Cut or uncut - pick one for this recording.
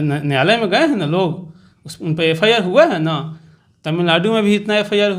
uncut